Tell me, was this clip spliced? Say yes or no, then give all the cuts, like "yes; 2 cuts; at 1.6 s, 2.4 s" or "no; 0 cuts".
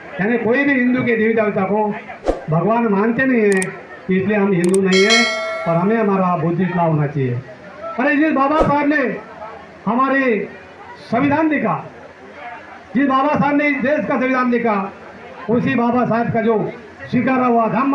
no; 0 cuts